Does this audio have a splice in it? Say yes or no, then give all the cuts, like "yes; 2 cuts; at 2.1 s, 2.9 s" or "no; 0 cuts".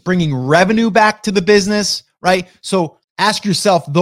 yes; 1 cut; at 3.0 s